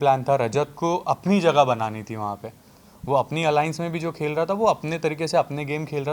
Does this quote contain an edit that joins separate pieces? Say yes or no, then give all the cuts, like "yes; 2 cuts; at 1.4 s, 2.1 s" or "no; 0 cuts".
no; 0 cuts